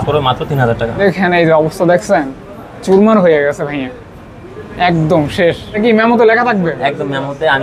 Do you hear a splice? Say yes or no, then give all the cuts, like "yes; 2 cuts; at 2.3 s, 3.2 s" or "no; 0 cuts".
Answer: yes; 2 cuts; at 1.0 s, 5.8 s